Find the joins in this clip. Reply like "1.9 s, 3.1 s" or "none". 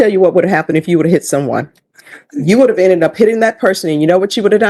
none